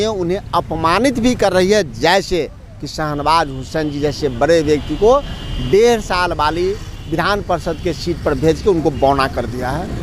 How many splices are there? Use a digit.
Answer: 0